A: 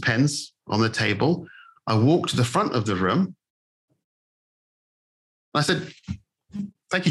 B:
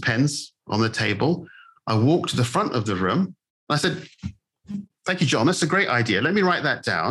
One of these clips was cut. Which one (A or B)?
B